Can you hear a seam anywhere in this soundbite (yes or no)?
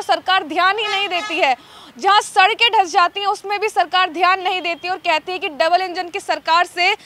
no